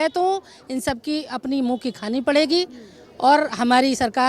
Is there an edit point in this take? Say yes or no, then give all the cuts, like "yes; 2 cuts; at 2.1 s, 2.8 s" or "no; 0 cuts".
no; 0 cuts